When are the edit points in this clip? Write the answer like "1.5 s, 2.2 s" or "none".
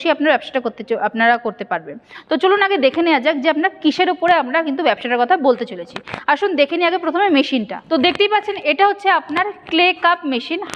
none